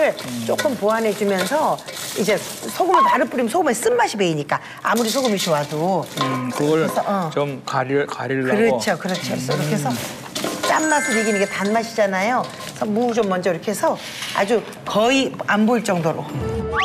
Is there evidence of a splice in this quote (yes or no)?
no